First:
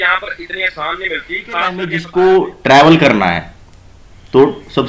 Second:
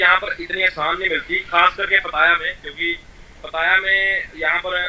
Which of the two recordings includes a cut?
first; 1 cut; at 2.0 s

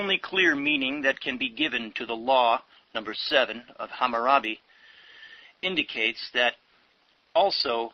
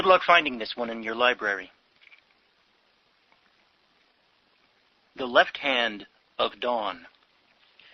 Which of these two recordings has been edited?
second; 1 cut; at 2.0 s

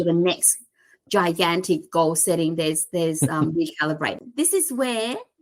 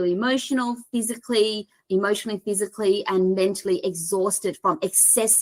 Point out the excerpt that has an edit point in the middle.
first; 1 cut; at 4.2 s

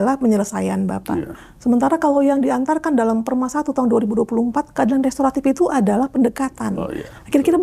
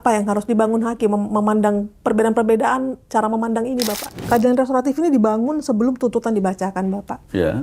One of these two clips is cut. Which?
second; 1 cut; at 4.1 s

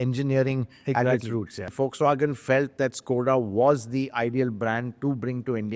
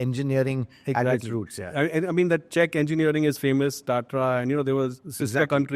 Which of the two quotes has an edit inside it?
first; 1 cut; at 1.7 s

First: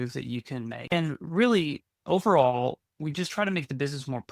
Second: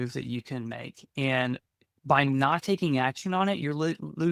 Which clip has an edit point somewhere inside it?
first; 1 cut; at 0.9 s

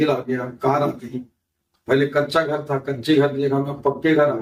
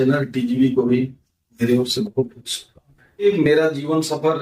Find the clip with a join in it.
second; 1 cut; at 3.2 s

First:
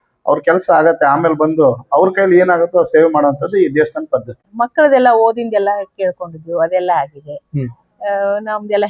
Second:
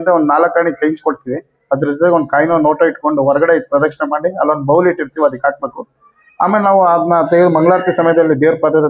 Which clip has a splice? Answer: first; 1 cut; at 4.4 s

